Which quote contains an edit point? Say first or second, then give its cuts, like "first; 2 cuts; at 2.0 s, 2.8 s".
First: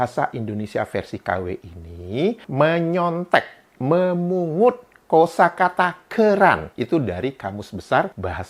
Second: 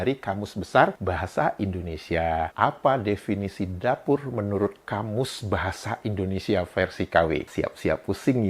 second; 1 cut; at 2.5 s